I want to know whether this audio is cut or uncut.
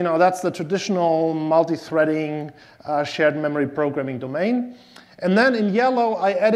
uncut